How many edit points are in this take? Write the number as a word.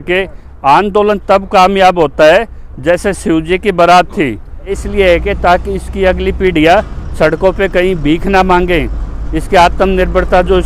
one